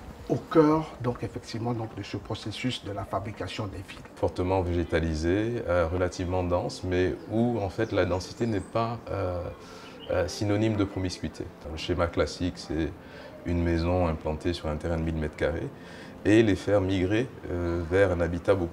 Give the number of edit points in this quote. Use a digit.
2